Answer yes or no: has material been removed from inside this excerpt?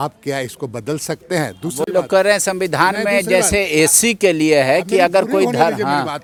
no